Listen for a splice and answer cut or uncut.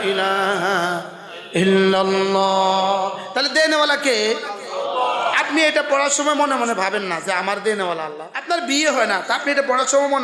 cut